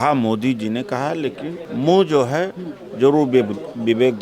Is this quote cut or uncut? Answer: cut